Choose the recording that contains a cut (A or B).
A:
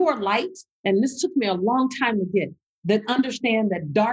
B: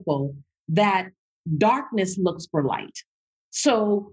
A